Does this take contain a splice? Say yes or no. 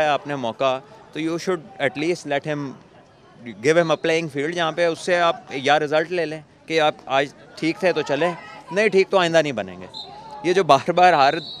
no